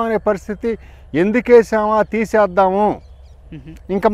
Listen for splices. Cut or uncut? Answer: uncut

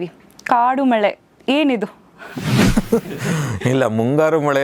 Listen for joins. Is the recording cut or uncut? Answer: uncut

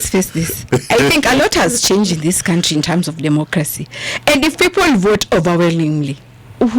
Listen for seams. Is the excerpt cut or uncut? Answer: uncut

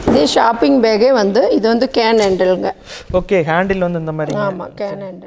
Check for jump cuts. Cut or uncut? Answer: uncut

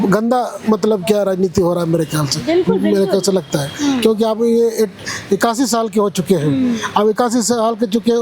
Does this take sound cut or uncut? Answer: uncut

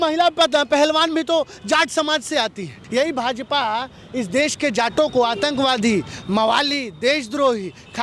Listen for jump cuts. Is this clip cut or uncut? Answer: cut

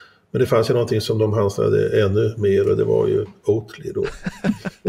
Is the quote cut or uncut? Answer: uncut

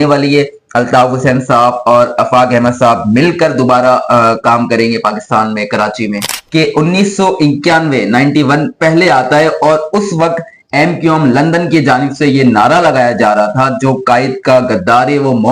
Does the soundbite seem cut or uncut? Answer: cut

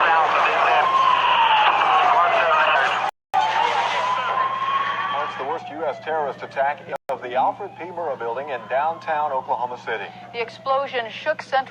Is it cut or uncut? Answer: cut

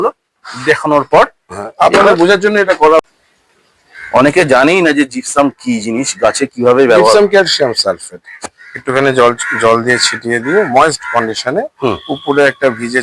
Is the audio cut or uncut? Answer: cut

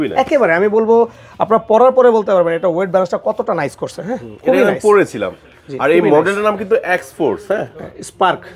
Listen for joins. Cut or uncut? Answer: uncut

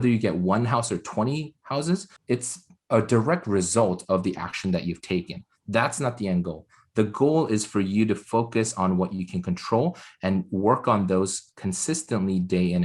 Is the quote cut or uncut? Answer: cut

